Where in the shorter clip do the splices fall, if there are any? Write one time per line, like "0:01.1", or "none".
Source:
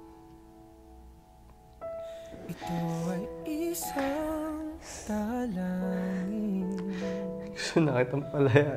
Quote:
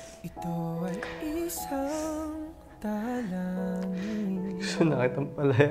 0:04.7